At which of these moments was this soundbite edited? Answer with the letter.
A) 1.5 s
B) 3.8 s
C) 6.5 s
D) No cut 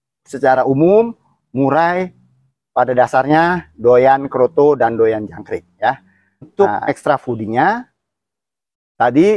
C